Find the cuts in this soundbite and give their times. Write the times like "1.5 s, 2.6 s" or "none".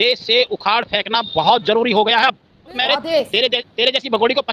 2.7 s